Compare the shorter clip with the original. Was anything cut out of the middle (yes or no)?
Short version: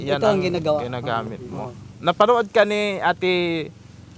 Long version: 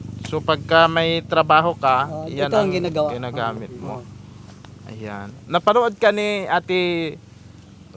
yes